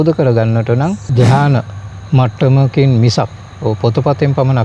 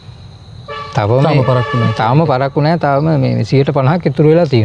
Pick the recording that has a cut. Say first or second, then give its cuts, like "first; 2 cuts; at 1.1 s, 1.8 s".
first; 1 cut; at 1.1 s